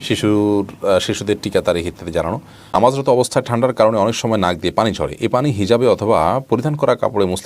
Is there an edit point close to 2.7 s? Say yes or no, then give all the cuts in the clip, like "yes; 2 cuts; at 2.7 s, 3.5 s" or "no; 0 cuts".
yes; 1 cut; at 2.7 s